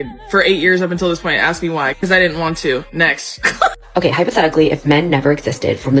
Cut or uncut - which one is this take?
cut